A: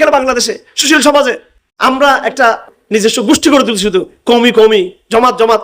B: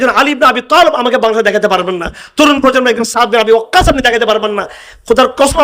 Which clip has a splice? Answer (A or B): A